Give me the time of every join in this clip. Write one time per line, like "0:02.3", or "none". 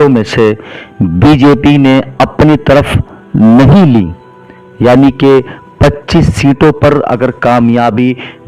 none